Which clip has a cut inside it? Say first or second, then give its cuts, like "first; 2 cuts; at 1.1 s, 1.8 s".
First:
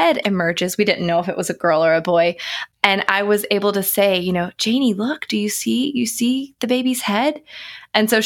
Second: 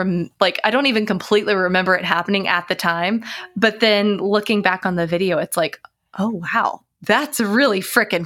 first; 1 cut; at 2.6 s